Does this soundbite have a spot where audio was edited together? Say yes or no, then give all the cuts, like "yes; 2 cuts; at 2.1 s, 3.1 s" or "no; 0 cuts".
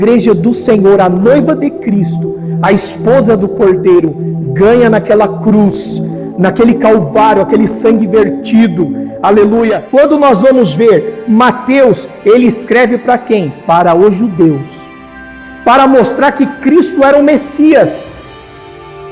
yes; 1 cut; at 9.8 s